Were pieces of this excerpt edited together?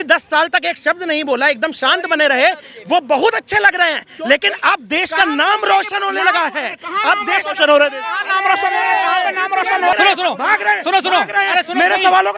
yes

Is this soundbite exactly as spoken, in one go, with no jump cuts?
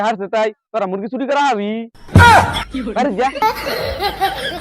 no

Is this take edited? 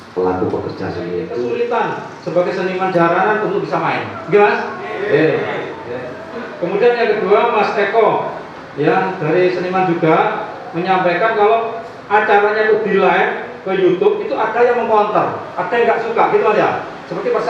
yes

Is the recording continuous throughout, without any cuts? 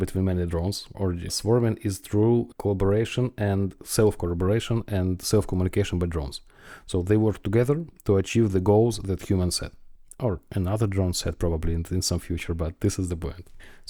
yes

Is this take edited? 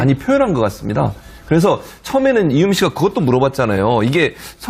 no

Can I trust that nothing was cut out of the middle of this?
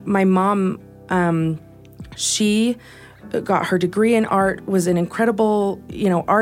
yes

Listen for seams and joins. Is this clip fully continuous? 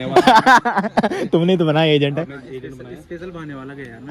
yes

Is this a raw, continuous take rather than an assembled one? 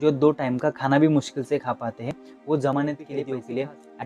no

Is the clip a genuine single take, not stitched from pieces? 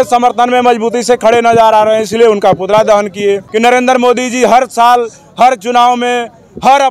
no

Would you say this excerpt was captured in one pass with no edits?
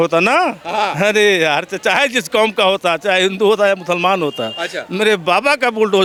yes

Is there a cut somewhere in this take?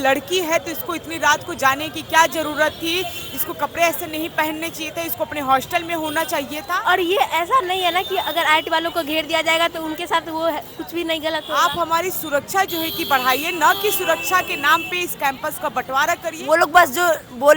yes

